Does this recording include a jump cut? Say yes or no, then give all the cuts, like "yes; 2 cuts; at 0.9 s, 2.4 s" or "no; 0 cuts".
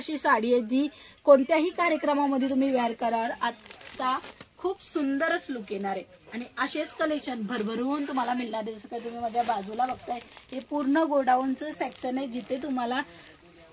no; 0 cuts